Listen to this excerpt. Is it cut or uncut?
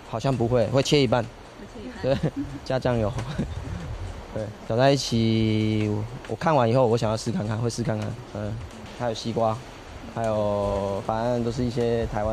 cut